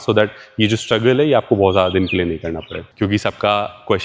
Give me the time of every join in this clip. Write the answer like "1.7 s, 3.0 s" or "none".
2.8 s